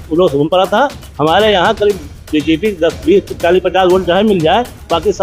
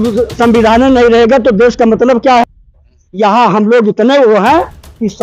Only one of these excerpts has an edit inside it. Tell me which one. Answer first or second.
second